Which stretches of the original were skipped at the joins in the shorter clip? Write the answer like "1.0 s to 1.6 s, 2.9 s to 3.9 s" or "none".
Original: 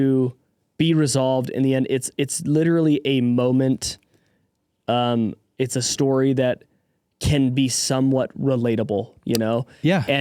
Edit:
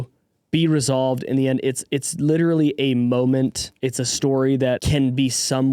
3.9 s to 5.4 s, 6.6 s to 7.2 s